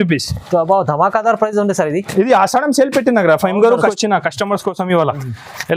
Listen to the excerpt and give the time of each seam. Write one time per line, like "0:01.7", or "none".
0:03.9